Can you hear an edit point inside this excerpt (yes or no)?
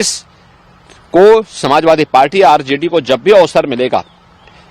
no